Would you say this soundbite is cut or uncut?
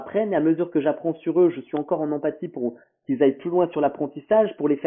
uncut